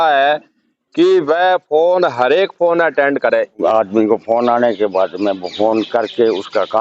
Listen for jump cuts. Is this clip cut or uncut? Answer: cut